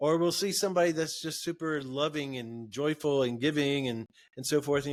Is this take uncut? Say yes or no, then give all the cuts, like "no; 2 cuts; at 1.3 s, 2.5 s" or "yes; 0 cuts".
yes; 0 cuts